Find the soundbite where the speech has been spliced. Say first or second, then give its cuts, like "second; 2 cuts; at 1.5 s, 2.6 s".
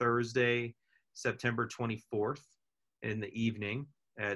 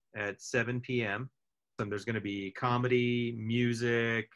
second; 1 cut; at 1.7 s